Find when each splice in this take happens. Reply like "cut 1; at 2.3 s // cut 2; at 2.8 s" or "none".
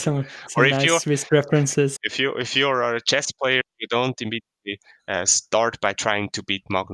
cut 1; at 2.0 s